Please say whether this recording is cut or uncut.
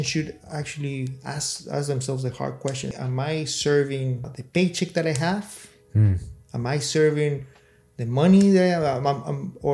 cut